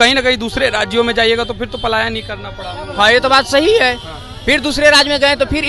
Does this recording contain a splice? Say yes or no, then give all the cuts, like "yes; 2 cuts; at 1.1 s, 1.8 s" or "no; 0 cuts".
no; 0 cuts